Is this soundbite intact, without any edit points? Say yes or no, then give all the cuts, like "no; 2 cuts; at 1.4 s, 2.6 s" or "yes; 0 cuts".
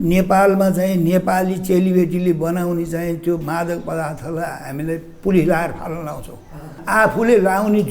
no; 1 cut; at 6.8 s